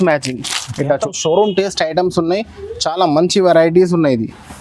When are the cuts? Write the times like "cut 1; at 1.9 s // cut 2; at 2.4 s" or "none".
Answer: cut 1; at 1.0 s